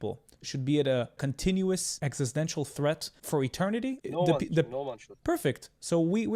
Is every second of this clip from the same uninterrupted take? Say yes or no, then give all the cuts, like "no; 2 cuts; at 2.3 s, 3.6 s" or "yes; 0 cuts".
no; 3 cuts; at 1.2 s, 1.9 s, 3.4 s